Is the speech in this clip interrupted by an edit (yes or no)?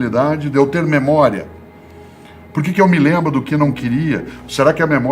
no